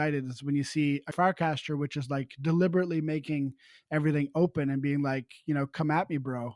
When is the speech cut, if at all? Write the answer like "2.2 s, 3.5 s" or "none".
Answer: 1.1 s